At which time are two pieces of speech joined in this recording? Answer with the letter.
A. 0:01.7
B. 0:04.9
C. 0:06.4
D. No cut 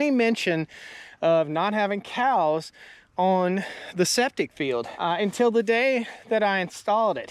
B